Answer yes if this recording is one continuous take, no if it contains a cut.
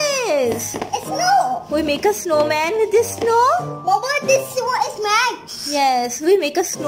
yes